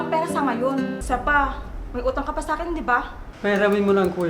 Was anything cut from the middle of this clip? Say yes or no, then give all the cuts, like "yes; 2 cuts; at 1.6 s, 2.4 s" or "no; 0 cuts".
yes; 2 cuts; at 1.0 s, 3.2 s